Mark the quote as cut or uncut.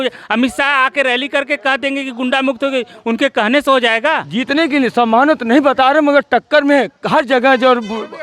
cut